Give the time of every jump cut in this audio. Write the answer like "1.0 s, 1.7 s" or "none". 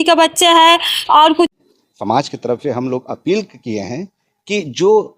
1.5 s